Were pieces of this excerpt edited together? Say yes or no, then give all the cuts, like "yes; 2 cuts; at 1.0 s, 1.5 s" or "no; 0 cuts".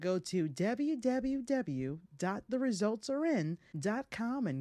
yes; 1 cut; at 3.7 s